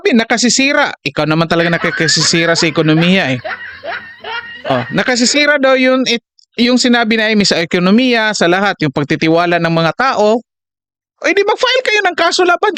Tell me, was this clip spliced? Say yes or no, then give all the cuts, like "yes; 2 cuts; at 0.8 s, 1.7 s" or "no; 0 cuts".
no; 0 cuts